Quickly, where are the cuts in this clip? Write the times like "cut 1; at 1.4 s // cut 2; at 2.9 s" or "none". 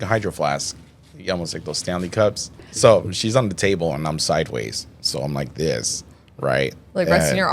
cut 1; at 2.6 s

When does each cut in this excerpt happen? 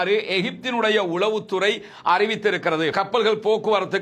cut 1; at 2.9 s

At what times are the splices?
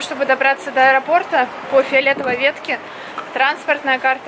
none

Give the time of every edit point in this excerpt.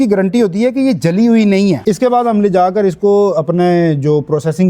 cut 1; at 1.8 s

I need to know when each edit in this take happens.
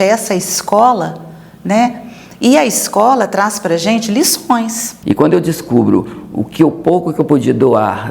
cut 1; at 4.9 s

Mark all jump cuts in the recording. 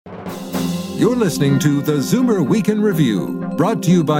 cut 1; at 1.0 s

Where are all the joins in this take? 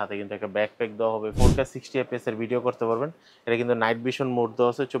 cut 1; at 1.3 s

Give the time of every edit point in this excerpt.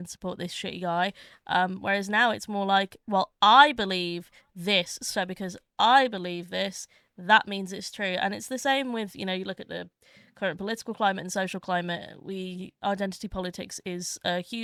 none

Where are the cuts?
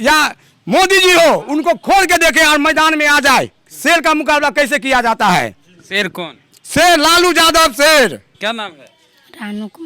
none

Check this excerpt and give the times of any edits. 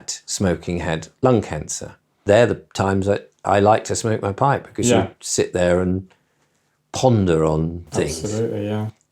cut 1; at 2.2 s

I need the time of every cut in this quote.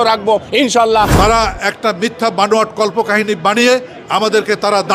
cut 1; at 1.1 s

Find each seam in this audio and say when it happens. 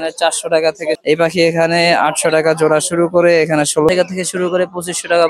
cut 1; at 1.0 s // cut 2; at 3.9 s

